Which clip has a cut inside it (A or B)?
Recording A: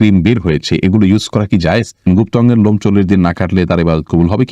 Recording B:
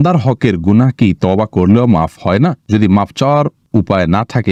A